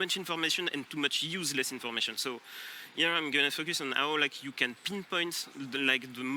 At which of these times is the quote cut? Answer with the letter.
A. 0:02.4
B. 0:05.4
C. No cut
C